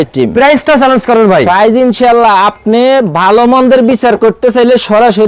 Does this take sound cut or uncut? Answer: uncut